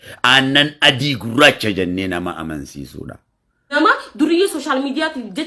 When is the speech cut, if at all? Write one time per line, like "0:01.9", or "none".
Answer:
0:03.7